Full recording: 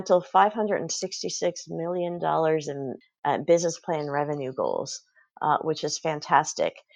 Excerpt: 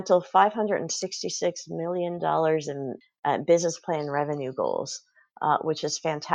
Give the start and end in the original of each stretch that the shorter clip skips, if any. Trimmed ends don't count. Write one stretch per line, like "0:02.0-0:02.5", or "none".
none